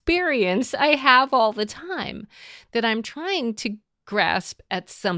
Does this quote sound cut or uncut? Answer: uncut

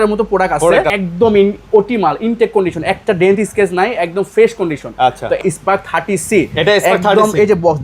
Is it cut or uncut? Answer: cut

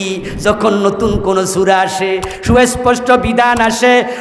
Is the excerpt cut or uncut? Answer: uncut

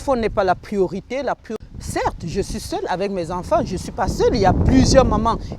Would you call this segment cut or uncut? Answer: cut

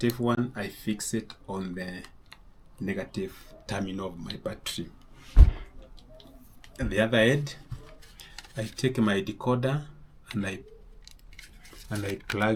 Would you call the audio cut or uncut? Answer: uncut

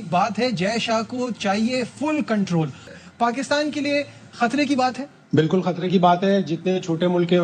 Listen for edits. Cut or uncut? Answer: cut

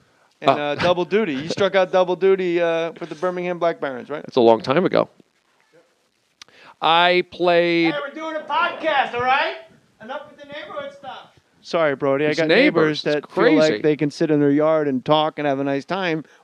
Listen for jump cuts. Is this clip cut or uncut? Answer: uncut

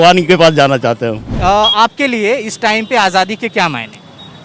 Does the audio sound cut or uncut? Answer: uncut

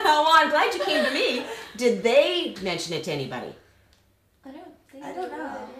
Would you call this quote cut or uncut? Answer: uncut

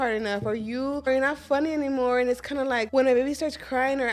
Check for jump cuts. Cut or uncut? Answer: cut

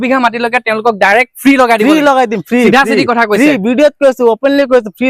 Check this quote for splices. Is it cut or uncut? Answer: uncut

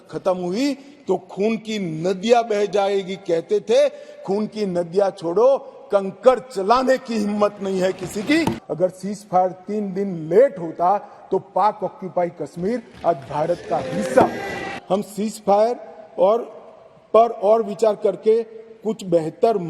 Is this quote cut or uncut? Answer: cut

